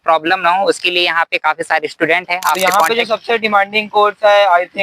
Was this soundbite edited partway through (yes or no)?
yes